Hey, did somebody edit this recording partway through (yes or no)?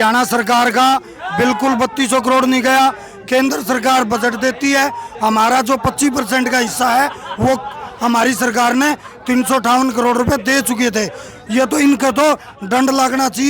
no